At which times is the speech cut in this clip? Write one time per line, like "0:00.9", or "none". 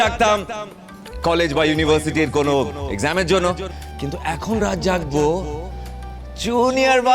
0:03.8